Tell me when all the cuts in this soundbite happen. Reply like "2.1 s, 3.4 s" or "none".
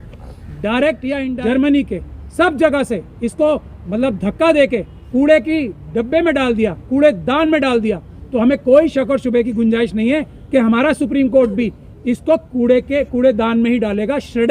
1.3 s